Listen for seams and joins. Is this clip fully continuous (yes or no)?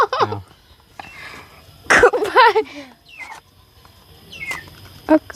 yes